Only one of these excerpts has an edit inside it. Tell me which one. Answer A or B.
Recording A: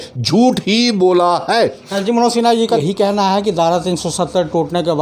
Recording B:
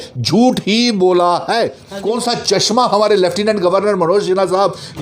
B